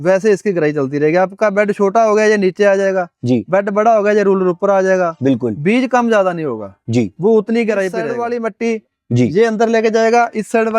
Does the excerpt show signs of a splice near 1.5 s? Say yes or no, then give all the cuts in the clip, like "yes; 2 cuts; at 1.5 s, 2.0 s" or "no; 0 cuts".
no; 1 cut; at 8.2 s